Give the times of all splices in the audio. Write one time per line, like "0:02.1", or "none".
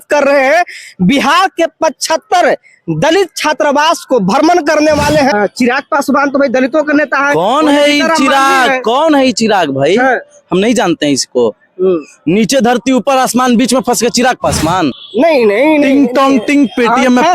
0:05.3
0:14.9